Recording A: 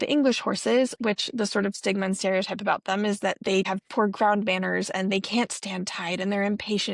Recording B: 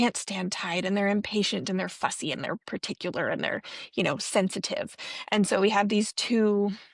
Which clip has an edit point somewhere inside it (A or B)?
A